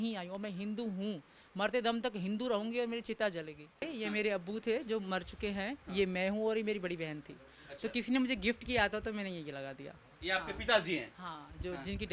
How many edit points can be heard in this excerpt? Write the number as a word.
one